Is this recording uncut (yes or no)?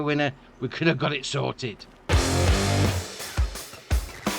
no